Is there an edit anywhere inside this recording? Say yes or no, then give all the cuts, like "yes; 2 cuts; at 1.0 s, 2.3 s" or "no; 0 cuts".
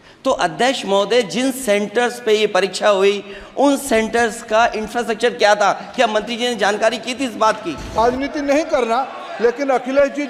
yes; 1 cut; at 8.0 s